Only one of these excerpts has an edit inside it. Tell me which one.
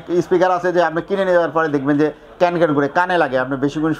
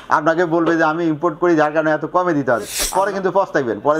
second; 1 cut; at 2.8 s

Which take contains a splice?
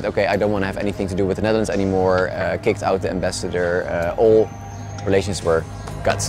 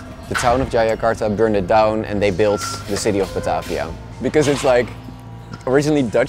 second; 1 cut; at 4.1 s

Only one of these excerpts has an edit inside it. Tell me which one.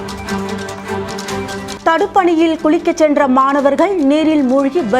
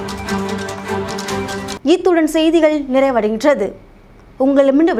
first; 1 cut; at 1.8 s

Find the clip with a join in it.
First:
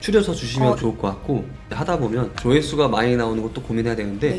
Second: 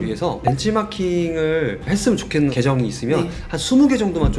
first; 1 cut; at 1.5 s

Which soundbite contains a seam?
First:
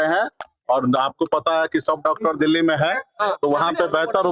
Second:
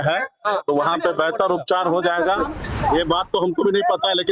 second; 1 cut; at 2.8 s

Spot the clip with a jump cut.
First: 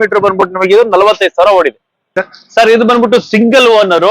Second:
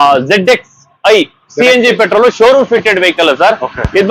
first; 1 cut; at 2.1 s

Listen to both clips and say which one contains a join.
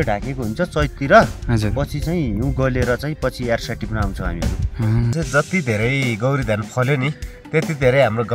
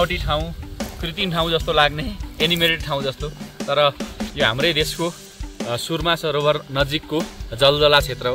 first; 1 cut; at 5.1 s

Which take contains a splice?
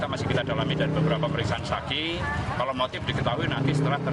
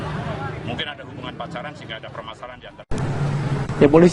second; 1 cut; at 2.7 s

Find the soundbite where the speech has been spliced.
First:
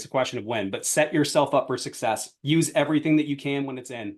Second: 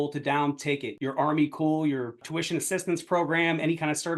second; 2 cuts; at 0.9 s, 2.2 s

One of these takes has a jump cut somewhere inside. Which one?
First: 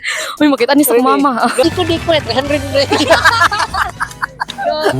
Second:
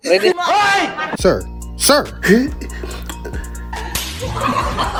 first; 1 cut; at 1.6 s

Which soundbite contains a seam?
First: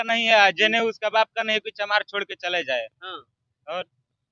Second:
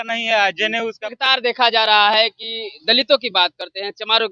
second; 1 cut; at 1.1 s

